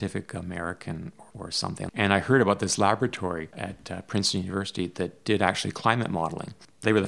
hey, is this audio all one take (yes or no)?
no